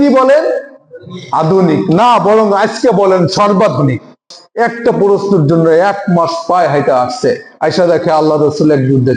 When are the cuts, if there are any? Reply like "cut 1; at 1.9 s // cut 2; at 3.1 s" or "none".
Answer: cut 1; at 4.4 s

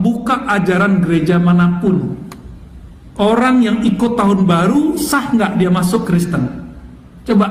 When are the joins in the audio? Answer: none

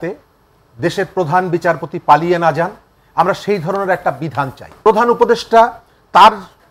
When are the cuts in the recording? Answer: cut 1; at 4.7 s

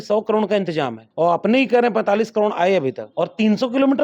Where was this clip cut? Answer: cut 1; at 1.0 s // cut 2; at 3.0 s

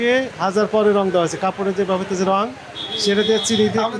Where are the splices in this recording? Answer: none

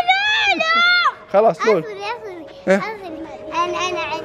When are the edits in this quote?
none

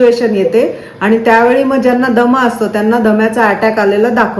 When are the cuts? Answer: none

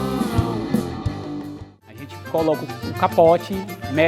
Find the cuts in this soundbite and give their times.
cut 1; at 2.1 s

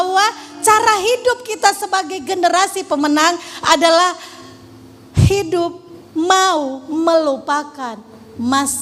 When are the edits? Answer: none

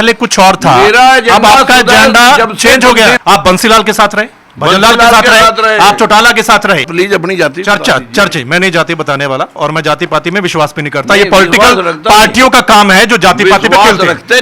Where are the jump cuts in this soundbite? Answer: cut 1; at 3.2 s // cut 2; at 6.8 s

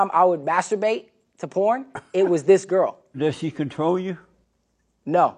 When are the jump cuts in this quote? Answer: cut 1; at 3.2 s

